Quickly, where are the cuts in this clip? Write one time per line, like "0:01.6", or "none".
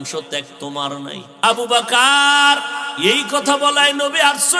0:01.3
0:02.8